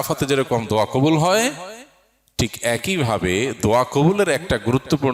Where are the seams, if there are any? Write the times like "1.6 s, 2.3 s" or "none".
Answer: none